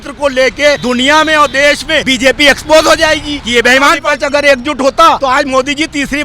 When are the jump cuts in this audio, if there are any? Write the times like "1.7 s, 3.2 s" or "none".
0.8 s, 2.1 s, 3.3 s, 4.0 s, 5.2 s